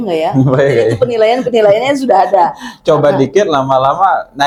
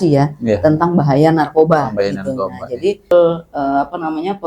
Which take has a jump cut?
second; 1 cut; at 3.1 s

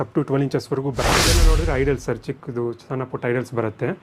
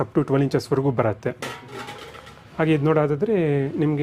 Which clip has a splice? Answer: first; 1 cut; at 1.4 s

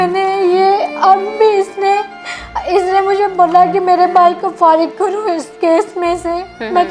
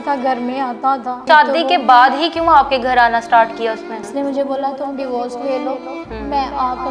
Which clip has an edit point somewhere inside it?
second; 2 cuts; at 1.2 s, 4.0 s

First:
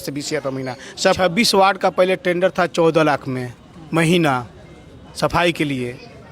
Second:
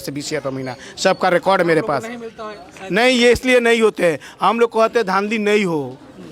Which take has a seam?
first; 1 cut; at 1.2 s

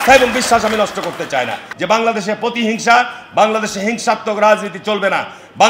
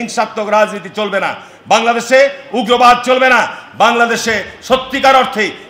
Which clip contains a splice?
first; 1 cut; at 1.7 s

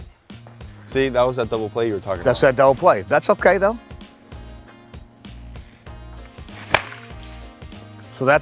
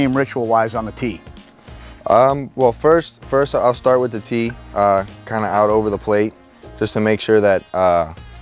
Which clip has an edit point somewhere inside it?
first; 2 cuts; at 0.9 s, 2.4 s

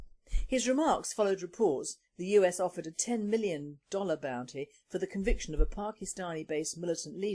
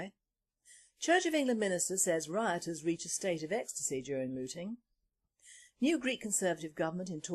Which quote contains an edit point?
second; 1 cut; at 3.1 s

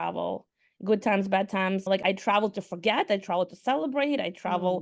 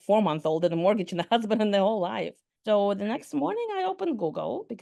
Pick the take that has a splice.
first; 1 cut; at 2.0 s

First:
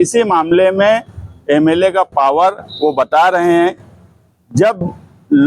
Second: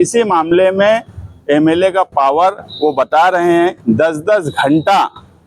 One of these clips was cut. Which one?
second; 1 cut; at 3.8 s

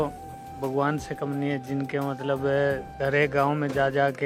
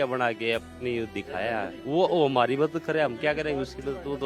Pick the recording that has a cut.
second; 1 cut; at 1.8 s

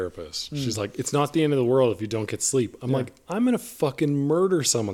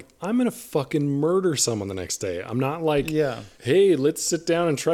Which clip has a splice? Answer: second; 1 cut; at 3.5 s

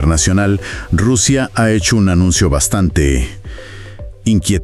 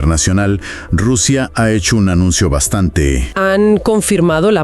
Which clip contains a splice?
second; 1 cut; at 3.3 s

